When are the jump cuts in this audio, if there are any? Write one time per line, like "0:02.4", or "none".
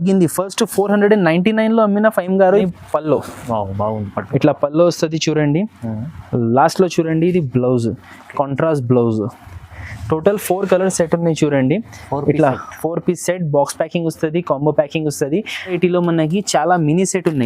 0:02.7
0:15.8